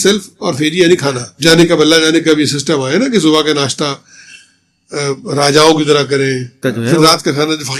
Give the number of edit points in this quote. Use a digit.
2